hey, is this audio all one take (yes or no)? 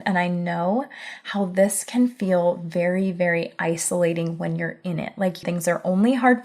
no